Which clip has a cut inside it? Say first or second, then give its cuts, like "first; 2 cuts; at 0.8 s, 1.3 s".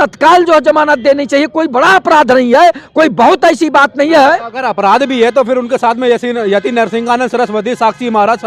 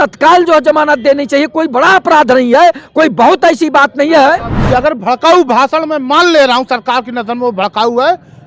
second; 1 cut; at 4.5 s